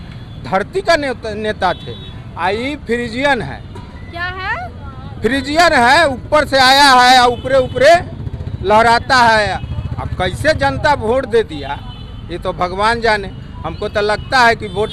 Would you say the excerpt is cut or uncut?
uncut